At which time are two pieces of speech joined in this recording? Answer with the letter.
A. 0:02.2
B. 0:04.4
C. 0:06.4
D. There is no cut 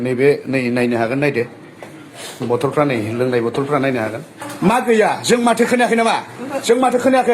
B